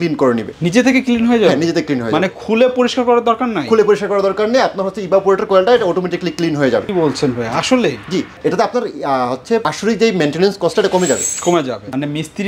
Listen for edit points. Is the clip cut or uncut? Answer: uncut